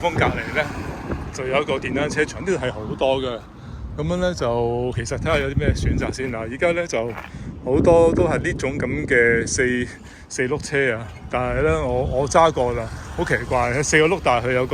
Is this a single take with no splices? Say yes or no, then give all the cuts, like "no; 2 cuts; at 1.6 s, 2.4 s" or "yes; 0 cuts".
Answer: yes; 0 cuts